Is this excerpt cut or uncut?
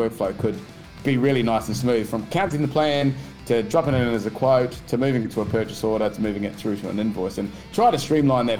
uncut